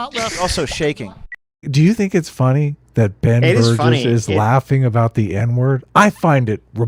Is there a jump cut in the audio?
yes; 1 cut; at 1.6 s

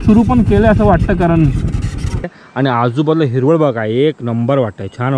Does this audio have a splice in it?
yes; 1 cut; at 2.4 s

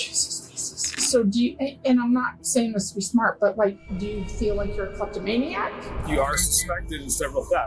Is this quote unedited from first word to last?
no; 2 cuts; at 1.0 s, 5.9 s

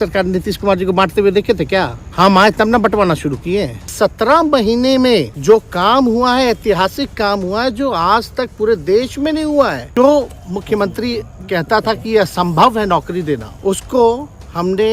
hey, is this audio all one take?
no; 5 cuts; at 2.0 s, 3.9 s, 5.3 s, 9.9 s, 13.5 s

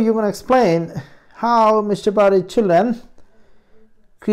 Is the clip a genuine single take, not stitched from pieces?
yes; 0 cuts

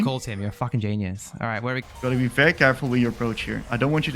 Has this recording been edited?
yes; 1 cut; at 1.8 s

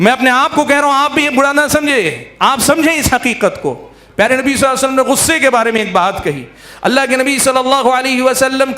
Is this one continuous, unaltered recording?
yes; 0 cuts

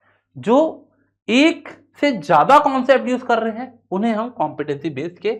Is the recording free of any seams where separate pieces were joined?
yes; 0 cuts

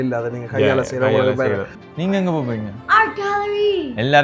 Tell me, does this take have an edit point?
yes; 1 cut; at 1.8 s

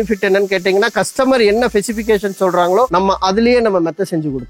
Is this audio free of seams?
no; 1 cut; at 2.9 s

